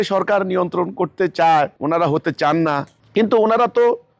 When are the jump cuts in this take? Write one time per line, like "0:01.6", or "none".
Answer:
0:01.8
0:03.0